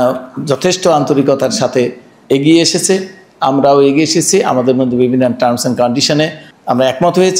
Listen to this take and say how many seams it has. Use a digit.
2